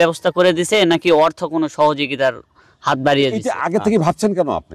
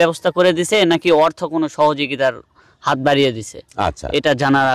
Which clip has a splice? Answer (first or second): first